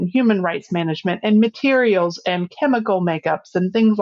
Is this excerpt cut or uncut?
uncut